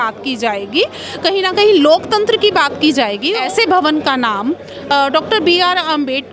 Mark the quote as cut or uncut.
cut